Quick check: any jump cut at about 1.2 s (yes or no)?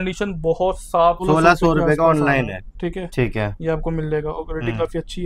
yes